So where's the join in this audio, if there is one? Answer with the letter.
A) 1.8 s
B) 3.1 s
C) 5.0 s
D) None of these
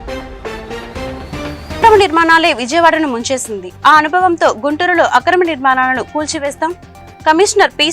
A